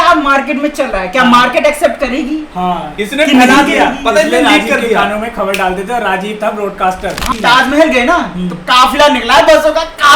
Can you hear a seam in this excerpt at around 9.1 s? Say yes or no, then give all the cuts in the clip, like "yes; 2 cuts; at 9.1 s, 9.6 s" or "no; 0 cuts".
no; 1 cut; at 7.2 s